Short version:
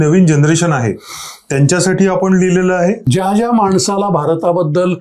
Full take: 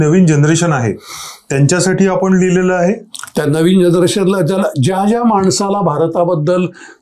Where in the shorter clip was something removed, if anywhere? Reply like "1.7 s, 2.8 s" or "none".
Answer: 3.0 s